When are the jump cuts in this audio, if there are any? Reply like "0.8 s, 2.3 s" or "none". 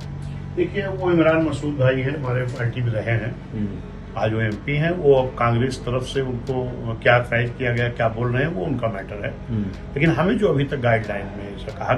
none